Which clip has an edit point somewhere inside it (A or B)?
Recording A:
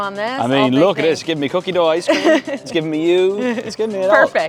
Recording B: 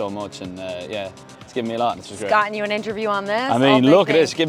B